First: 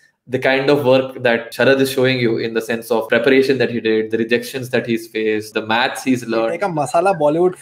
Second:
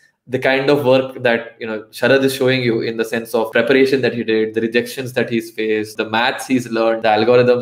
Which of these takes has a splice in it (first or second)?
first